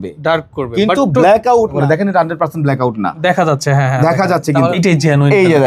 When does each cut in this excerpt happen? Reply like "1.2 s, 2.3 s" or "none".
1.8 s, 4.8 s